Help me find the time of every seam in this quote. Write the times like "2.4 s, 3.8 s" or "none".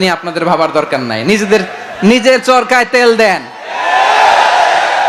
none